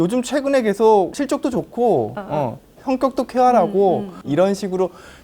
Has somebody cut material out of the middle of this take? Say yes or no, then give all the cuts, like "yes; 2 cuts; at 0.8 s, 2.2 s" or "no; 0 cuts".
yes; 2 cuts; at 1.1 s, 4.2 s